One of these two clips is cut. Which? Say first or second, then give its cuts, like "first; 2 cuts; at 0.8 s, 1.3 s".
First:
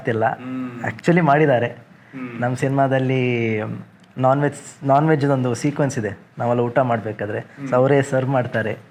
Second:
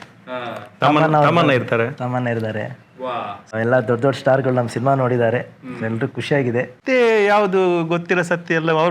second; 2 cuts; at 3.5 s, 6.8 s